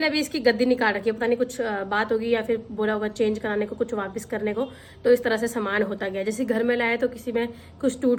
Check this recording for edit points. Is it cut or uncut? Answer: uncut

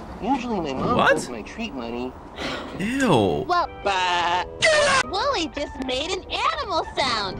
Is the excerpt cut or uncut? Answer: cut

